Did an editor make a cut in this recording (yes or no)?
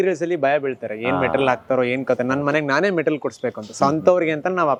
no